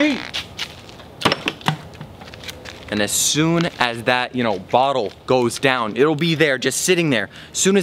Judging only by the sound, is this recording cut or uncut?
uncut